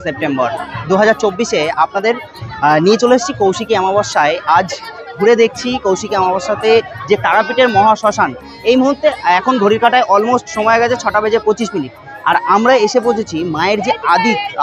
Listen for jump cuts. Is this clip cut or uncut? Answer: uncut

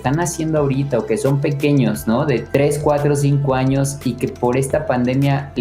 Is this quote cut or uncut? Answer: cut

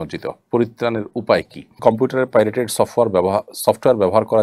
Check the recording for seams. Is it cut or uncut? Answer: cut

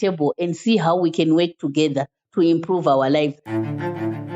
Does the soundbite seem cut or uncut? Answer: cut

